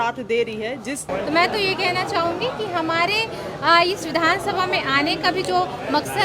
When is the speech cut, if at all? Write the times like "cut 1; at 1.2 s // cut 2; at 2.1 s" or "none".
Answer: cut 1; at 1.1 s